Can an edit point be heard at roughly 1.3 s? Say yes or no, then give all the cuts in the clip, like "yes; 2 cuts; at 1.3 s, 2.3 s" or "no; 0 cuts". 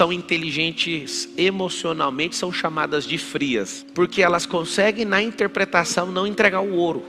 no; 1 cut; at 3.8 s